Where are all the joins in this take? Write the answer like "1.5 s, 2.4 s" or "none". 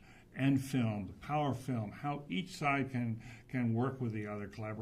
3.7 s